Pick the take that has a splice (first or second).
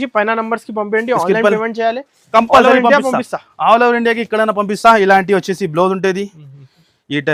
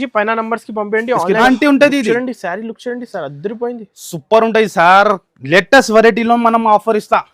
second